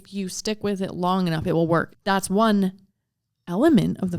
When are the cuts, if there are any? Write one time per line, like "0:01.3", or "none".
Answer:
0:01.9